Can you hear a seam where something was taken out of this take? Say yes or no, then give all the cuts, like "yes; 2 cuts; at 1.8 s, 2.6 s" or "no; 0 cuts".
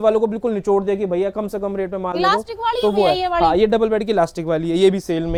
no; 0 cuts